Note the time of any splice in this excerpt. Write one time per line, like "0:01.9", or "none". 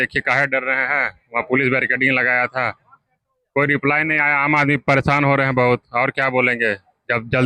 none